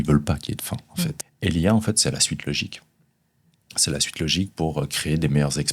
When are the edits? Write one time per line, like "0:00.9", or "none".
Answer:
0:01.2